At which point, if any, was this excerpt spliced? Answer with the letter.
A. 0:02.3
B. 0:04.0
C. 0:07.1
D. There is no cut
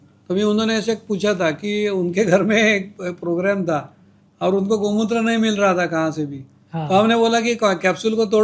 D